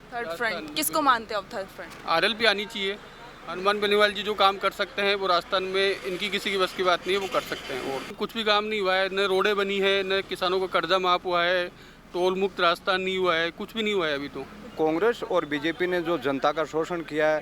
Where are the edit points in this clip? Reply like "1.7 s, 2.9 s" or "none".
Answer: 8.1 s, 14.7 s